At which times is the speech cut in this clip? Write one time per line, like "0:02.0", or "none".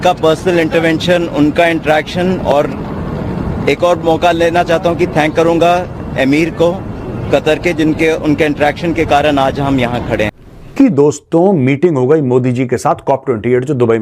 0:10.4